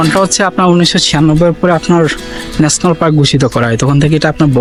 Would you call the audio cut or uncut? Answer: uncut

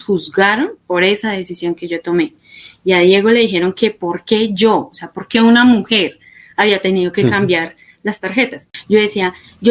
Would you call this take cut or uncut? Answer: cut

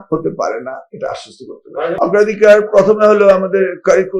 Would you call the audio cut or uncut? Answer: cut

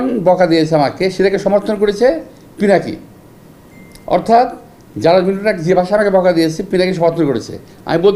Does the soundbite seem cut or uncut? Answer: uncut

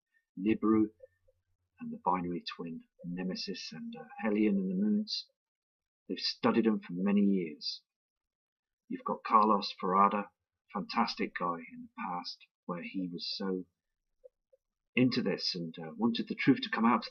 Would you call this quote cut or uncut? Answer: uncut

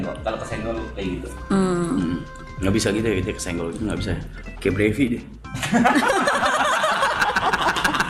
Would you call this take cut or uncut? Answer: uncut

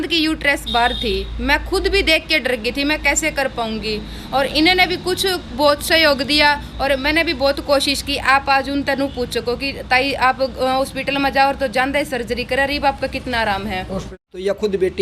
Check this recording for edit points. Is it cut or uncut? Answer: cut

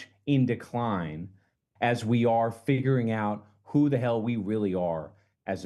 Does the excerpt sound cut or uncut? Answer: uncut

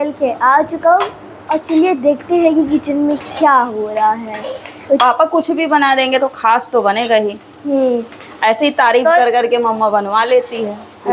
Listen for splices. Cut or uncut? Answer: cut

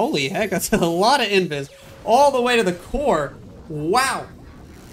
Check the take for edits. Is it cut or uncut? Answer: uncut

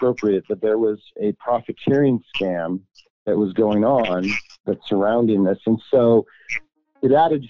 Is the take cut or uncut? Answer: uncut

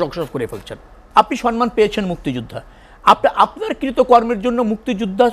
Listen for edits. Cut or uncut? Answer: cut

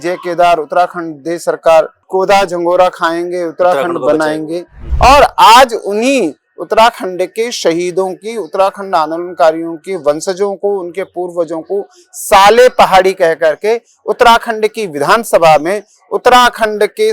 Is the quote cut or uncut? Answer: cut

